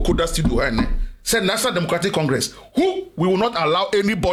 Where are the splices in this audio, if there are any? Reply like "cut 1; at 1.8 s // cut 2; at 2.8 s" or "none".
none